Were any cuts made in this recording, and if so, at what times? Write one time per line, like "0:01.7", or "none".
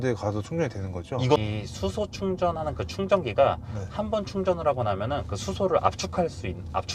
0:01.4